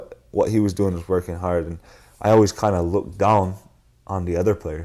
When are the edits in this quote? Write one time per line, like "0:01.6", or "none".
none